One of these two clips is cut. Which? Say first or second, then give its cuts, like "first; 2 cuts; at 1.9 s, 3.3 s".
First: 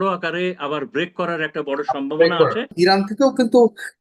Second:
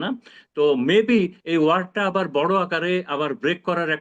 first; 1 cut; at 2.7 s